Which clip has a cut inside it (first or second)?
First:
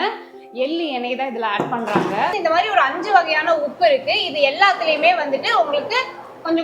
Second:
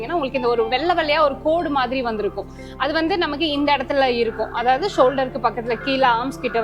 first